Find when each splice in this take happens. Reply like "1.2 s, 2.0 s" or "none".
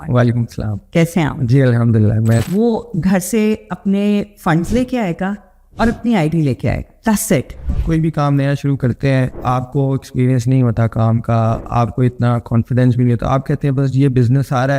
2.5 s, 7.7 s